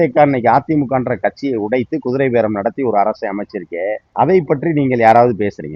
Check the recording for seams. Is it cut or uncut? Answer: cut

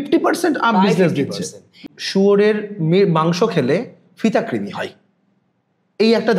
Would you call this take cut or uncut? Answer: cut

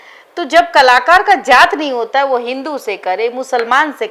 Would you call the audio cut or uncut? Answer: uncut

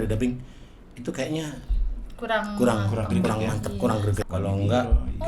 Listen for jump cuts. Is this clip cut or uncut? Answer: cut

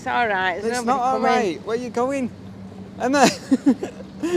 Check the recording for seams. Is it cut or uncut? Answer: uncut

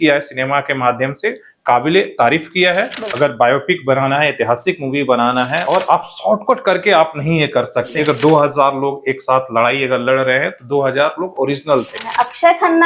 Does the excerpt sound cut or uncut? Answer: cut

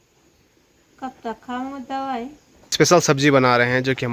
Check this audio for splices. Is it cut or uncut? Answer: cut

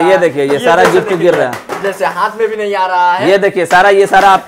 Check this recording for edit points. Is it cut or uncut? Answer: uncut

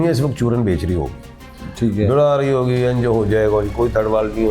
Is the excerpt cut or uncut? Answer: uncut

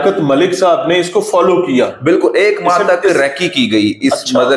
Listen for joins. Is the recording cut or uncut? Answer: uncut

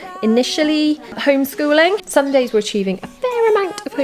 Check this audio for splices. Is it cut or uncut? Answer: cut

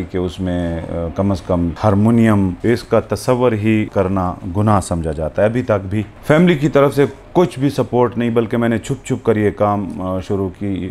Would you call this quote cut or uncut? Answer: cut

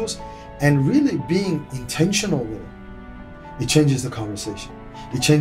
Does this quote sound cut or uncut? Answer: cut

